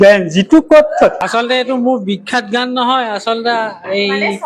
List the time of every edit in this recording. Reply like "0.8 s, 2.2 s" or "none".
1.3 s